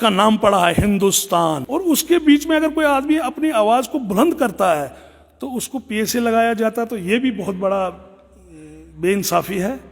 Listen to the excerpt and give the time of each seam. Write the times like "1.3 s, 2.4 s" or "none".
1.7 s